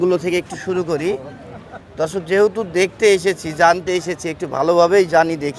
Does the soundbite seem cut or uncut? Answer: uncut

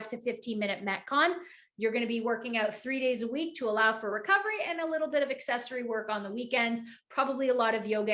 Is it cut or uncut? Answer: uncut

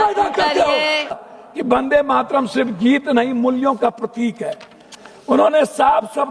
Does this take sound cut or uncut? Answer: cut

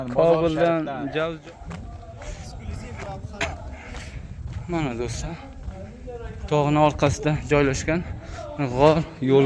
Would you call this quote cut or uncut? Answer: cut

